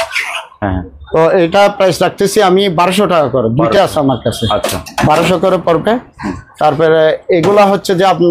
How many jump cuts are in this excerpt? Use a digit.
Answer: 0